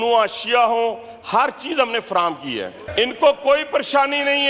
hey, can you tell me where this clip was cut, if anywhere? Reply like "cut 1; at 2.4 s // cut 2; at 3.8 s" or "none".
cut 1; at 2.8 s